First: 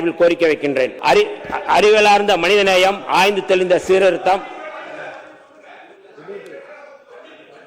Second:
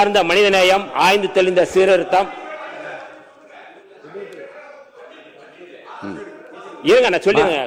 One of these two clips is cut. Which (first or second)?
first